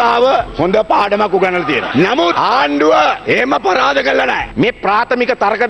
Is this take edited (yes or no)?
yes